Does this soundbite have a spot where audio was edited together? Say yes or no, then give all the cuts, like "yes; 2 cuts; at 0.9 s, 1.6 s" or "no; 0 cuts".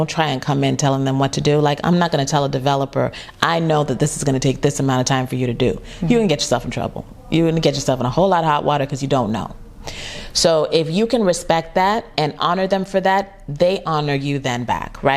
yes; 1 cut; at 12.1 s